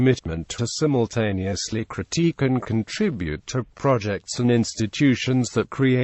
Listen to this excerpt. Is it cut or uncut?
cut